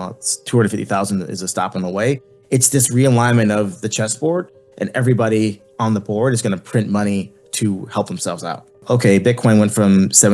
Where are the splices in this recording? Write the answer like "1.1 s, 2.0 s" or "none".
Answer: 8.8 s

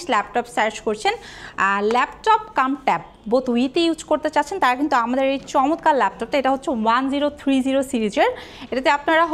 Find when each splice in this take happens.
none

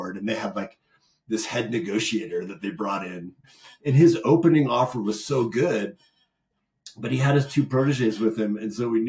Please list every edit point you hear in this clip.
3.5 s

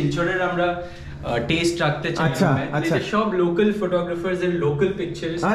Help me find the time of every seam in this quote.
none

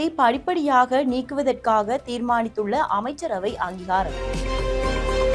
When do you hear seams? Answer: 4.2 s

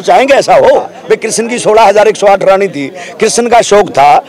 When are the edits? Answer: 1.0 s

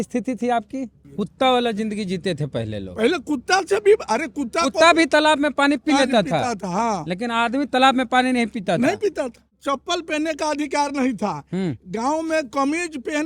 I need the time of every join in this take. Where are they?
1.0 s, 9.6 s

